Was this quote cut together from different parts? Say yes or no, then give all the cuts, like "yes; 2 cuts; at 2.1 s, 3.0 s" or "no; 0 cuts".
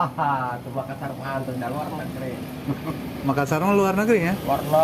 no; 0 cuts